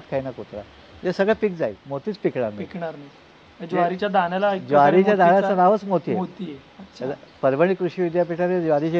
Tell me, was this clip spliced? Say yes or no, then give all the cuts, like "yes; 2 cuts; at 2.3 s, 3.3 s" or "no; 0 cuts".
yes; 1 cut; at 1.8 s